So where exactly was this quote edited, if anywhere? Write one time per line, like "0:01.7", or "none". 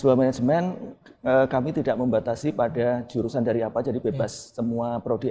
none